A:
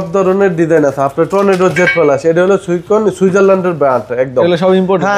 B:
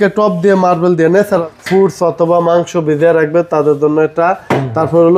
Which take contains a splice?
B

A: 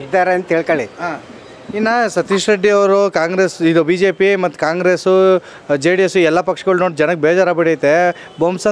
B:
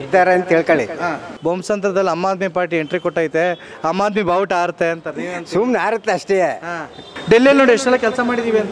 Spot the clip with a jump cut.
B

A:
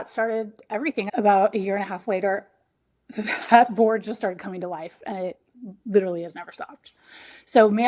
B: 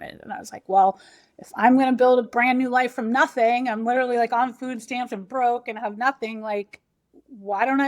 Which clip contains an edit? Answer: A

